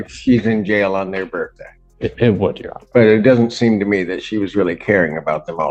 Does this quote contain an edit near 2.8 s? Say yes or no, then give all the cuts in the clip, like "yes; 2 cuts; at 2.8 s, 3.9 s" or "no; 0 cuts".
no; 0 cuts